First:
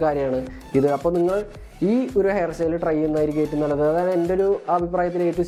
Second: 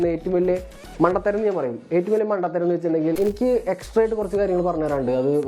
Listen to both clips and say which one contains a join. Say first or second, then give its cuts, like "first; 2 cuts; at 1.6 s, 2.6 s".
second; 1 cut; at 3.2 s